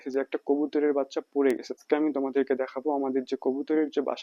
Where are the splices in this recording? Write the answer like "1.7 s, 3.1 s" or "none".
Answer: 1.8 s